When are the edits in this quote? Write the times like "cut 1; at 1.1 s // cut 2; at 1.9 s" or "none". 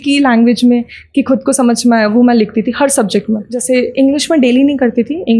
cut 1; at 3.5 s